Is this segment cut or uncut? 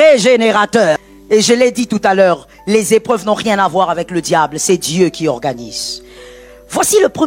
cut